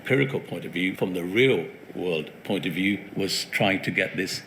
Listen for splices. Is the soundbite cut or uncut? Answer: cut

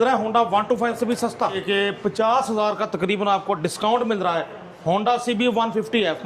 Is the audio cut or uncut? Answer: cut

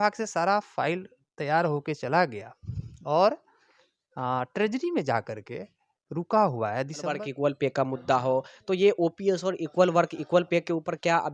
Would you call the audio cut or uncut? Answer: cut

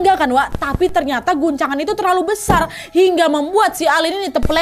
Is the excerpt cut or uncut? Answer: uncut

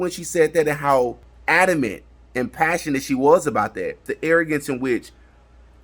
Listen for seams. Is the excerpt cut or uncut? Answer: cut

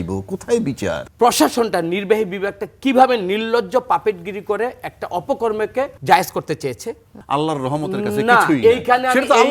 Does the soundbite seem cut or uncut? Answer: cut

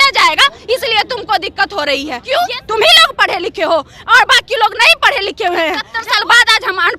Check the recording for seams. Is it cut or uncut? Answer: cut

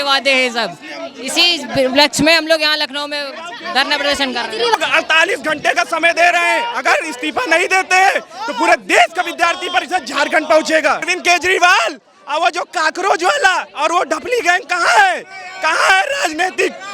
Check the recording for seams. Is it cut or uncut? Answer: cut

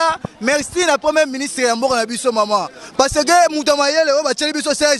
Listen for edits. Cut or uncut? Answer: uncut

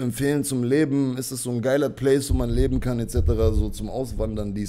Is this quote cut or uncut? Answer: uncut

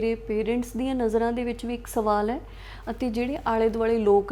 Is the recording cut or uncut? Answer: uncut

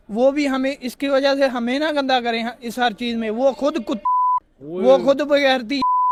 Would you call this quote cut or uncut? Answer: uncut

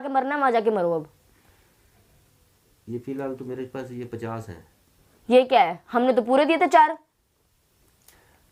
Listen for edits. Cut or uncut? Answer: uncut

